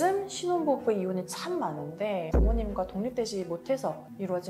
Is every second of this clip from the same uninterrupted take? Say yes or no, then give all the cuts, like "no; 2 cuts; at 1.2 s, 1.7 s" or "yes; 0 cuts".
no; 1 cut; at 2.3 s